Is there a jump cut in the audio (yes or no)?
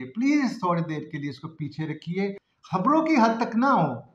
yes